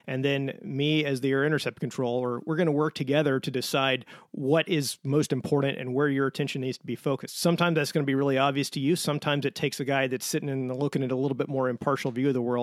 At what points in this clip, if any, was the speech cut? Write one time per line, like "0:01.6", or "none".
none